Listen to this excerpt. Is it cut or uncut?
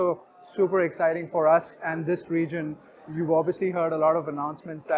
uncut